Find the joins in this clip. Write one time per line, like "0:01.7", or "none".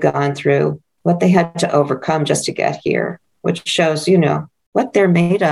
0:00.9
0:04.5